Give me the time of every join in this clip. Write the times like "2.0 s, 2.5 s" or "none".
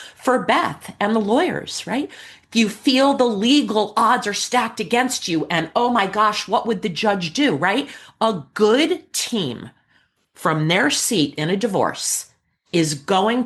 none